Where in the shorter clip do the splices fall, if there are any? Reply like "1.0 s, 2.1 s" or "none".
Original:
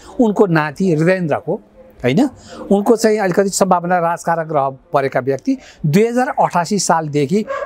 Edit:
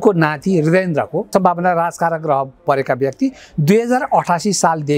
1.3 s